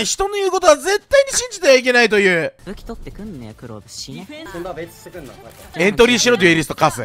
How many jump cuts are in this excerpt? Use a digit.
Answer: 3